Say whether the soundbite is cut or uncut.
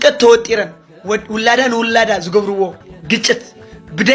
cut